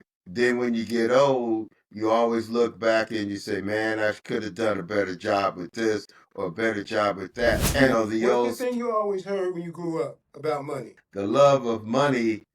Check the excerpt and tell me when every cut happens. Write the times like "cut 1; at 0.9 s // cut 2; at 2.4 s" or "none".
cut 1; at 7.9 s // cut 2; at 10.9 s